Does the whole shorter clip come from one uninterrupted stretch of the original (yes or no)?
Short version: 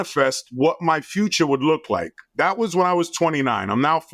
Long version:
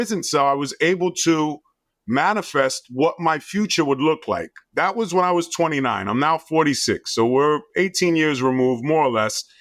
yes